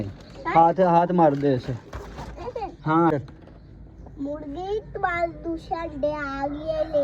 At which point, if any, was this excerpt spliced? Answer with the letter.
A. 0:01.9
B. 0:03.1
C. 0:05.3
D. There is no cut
B